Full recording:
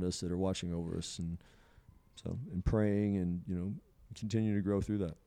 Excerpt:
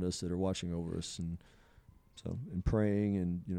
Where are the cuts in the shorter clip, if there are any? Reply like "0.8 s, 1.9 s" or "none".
none